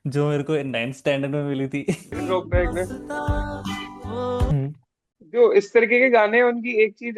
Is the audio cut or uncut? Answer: cut